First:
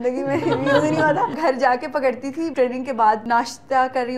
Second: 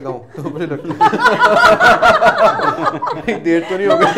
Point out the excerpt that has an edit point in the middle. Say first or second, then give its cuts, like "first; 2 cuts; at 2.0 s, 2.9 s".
first; 3 cuts; at 1.3 s, 2.5 s, 3.2 s